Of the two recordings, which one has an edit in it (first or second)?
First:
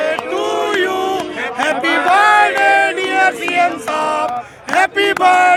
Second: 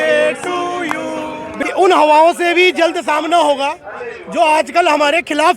second